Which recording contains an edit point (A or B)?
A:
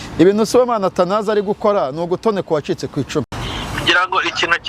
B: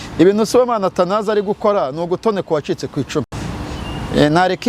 A